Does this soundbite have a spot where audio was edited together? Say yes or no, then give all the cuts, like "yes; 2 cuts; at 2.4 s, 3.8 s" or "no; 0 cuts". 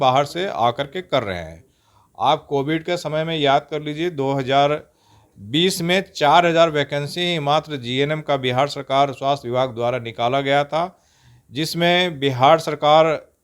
no; 0 cuts